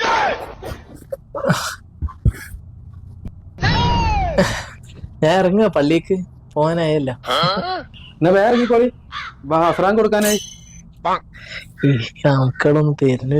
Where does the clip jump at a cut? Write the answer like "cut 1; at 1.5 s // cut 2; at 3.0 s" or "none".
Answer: none